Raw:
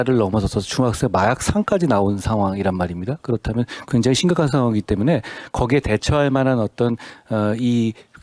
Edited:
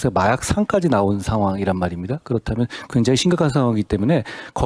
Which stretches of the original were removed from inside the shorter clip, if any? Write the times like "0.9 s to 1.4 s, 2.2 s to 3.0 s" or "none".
none